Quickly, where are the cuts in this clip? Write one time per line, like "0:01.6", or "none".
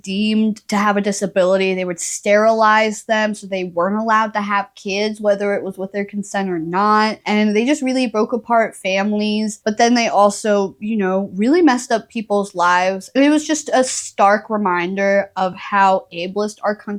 none